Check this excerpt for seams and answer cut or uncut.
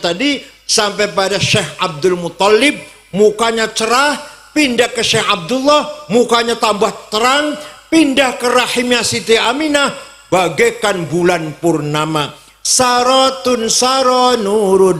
uncut